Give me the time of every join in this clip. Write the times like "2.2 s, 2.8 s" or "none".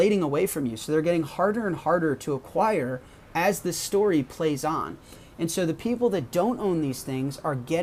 none